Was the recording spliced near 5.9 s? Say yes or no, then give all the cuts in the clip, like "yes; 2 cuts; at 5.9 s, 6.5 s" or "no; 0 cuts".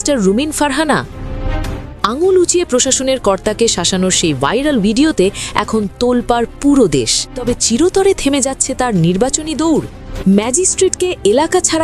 no; 2 cuts; at 7.4 s, 10.1 s